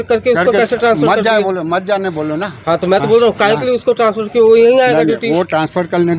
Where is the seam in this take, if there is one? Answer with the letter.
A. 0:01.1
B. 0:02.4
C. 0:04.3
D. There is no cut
D